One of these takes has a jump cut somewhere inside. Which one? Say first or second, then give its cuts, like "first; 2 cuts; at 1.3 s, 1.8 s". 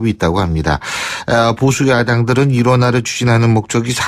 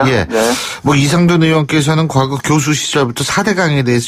second; 1 cut; at 2.4 s